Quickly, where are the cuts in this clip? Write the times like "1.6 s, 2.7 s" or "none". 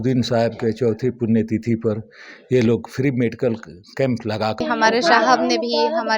4.6 s